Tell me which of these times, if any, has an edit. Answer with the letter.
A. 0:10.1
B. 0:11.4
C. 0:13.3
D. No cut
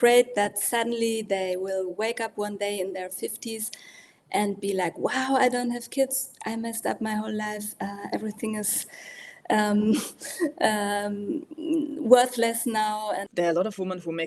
C